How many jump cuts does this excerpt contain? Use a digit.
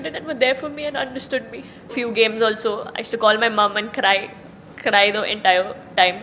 1